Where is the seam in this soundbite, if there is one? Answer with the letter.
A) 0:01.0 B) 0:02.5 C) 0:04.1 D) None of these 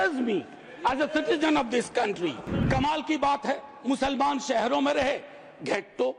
B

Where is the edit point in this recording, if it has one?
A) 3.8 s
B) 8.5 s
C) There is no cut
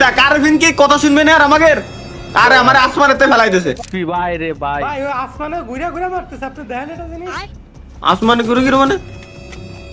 A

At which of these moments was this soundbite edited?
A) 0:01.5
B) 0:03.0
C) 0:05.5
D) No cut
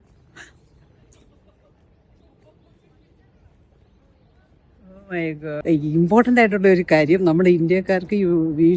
C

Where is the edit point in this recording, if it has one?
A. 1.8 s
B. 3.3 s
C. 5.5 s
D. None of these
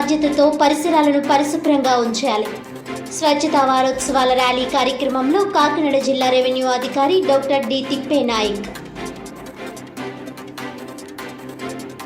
D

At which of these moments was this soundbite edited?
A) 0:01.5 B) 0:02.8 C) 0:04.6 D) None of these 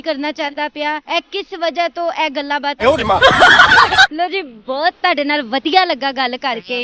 B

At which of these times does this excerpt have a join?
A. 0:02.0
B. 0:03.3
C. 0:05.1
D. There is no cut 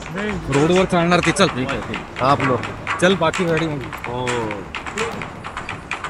C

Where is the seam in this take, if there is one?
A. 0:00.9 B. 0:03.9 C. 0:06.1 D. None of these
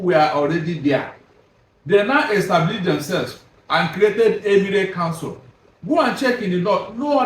D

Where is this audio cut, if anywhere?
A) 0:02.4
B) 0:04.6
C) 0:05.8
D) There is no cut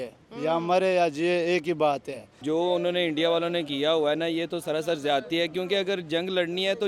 A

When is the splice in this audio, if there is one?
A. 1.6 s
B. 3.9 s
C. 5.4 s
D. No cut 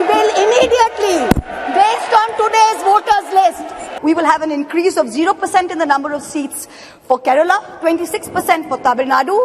B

